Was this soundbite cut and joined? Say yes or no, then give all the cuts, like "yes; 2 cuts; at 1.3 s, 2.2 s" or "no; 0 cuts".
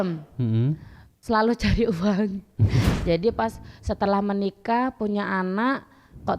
yes; 1 cut; at 2.8 s